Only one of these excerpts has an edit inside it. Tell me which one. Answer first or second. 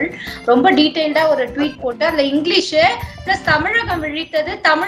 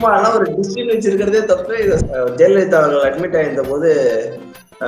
second